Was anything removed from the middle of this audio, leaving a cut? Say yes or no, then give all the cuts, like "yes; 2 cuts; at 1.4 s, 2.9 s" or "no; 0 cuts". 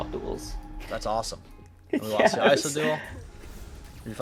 no; 0 cuts